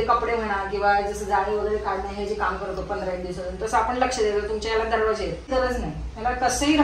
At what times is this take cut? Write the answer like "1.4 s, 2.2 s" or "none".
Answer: 5.5 s